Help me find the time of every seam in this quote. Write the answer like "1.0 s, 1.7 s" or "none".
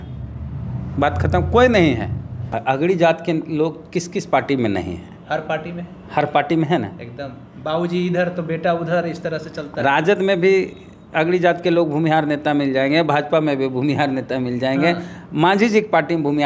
2.5 s